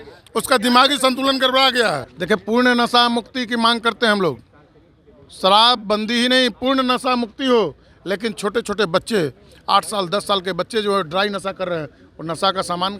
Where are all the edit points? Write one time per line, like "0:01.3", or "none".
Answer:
0:02.1